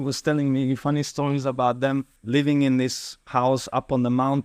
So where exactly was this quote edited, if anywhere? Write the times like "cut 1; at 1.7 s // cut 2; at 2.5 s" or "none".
cut 1; at 2.1 s